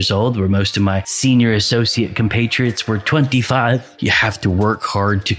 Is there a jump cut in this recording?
yes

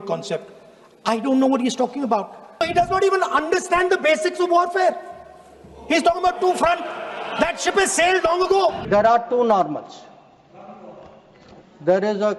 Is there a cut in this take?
yes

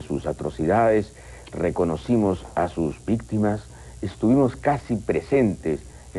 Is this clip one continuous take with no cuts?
yes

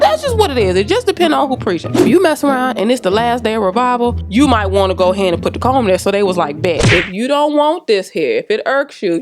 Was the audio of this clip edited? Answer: yes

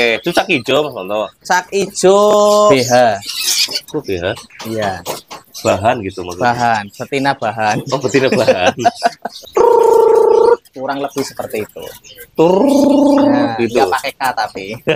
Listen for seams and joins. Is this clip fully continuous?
no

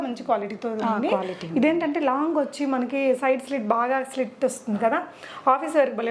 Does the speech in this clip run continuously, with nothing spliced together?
yes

